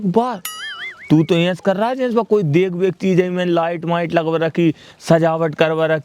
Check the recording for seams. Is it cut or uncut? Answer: uncut